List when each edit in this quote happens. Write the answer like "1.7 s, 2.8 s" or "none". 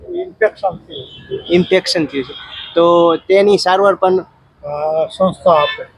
none